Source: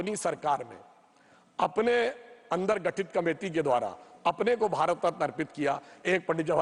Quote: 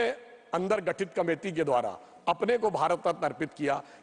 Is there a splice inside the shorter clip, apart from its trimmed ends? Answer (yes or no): no